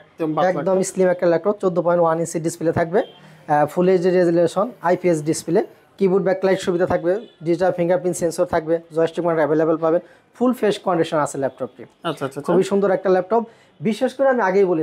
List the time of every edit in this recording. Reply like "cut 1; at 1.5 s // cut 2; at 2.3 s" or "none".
none